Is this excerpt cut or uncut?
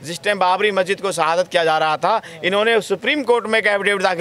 uncut